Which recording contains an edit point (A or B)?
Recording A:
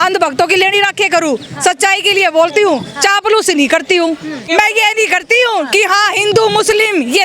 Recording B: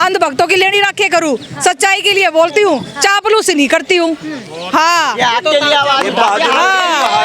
A